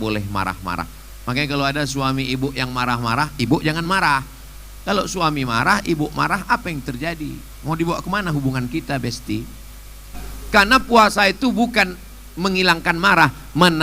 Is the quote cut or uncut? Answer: cut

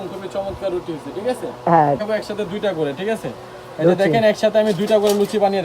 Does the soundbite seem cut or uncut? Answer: cut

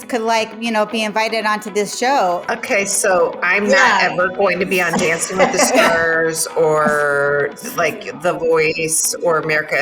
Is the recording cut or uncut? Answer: uncut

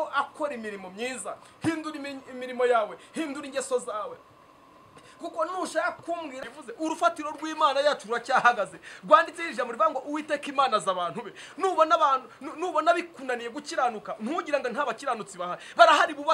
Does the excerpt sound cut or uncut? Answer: cut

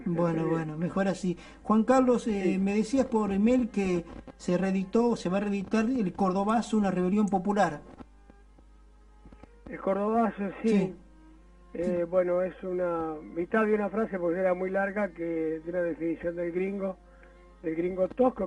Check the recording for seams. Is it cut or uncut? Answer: cut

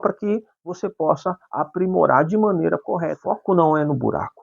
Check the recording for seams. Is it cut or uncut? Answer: cut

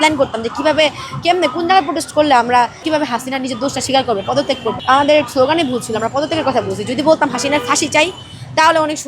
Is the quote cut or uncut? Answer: cut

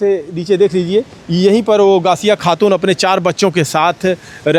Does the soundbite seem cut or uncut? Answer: uncut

